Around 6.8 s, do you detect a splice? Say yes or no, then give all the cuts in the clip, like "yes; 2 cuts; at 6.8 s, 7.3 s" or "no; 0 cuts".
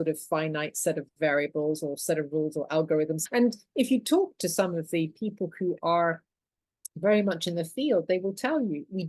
no; 1 cut; at 3.2 s